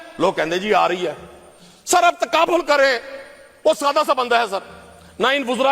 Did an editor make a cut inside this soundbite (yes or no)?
no